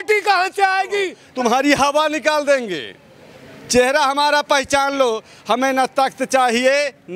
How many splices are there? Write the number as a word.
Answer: one